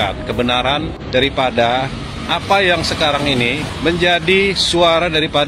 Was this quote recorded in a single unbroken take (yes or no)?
no